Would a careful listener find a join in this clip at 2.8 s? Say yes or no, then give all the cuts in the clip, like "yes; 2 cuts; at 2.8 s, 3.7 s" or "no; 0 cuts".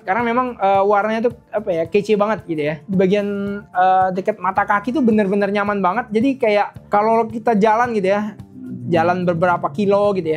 yes; 2 cuts; at 2.8 s, 6.8 s